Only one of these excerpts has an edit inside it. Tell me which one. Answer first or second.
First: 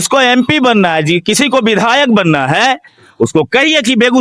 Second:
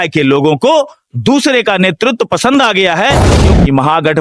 second